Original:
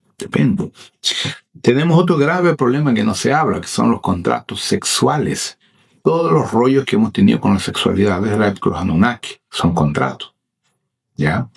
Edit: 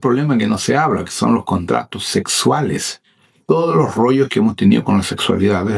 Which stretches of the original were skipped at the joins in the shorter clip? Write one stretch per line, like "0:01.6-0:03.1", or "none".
none